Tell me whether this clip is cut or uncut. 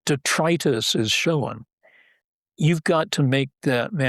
cut